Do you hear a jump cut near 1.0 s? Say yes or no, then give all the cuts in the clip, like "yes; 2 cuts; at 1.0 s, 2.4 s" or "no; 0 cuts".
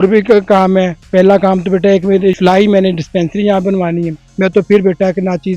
no; 2 cuts; at 2.3 s, 4.3 s